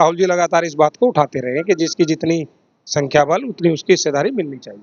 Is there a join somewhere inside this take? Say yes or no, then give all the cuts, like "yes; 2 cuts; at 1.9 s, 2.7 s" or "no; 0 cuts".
no; 0 cuts